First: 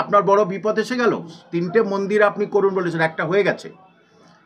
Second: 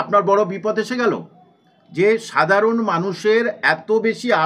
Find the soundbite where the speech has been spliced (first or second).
first